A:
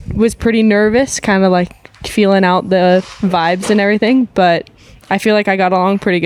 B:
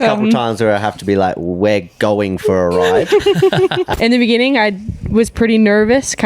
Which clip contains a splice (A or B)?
B